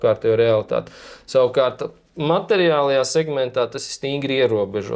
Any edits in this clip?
no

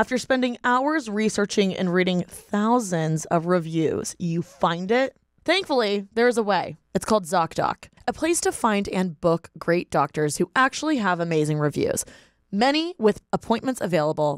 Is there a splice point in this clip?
yes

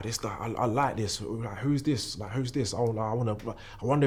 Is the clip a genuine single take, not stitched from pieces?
yes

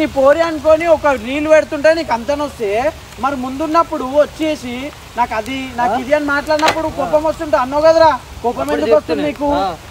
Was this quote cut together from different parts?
no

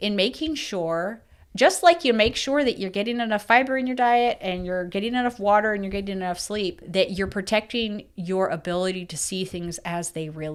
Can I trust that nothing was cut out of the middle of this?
yes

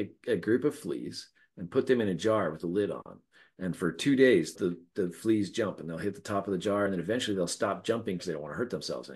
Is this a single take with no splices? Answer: no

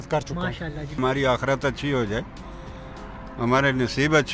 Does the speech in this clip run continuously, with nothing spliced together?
no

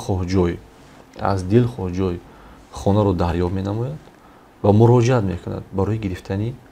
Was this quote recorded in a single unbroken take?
yes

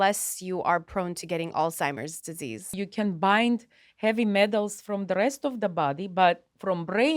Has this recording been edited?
yes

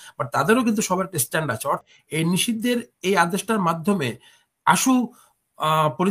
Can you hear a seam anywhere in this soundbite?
yes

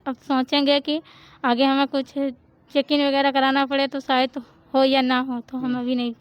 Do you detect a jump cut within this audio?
no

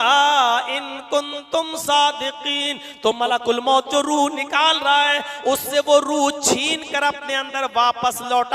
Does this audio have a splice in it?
no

